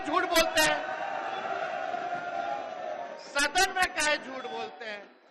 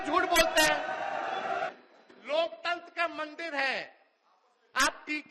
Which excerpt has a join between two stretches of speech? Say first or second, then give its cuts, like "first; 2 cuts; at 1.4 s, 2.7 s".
second; 1 cut; at 1.7 s